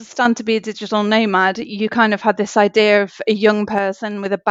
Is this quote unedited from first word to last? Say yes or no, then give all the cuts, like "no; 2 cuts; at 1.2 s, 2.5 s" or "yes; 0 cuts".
yes; 0 cuts